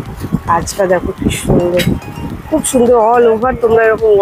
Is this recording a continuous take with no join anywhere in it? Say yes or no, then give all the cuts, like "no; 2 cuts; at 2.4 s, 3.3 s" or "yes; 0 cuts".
yes; 0 cuts